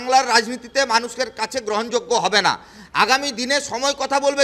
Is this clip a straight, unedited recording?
yes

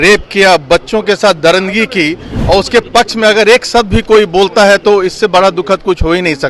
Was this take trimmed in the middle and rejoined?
no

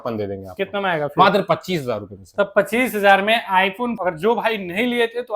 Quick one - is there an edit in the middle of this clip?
yes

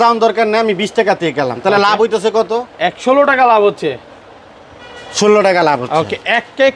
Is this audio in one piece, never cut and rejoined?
yes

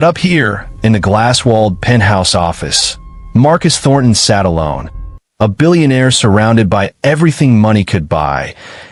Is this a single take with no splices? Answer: yes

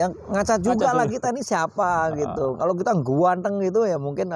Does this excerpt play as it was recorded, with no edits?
yes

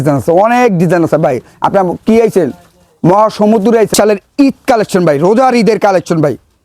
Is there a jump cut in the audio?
yes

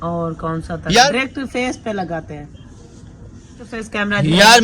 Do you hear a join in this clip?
yes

